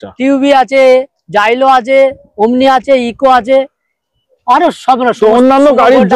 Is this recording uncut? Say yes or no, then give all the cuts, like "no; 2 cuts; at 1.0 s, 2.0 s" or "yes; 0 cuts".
yes; 0 cuts